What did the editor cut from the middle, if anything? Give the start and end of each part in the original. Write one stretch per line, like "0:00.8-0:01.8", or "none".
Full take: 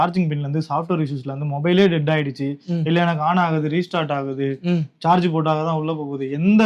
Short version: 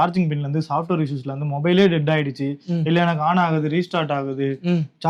none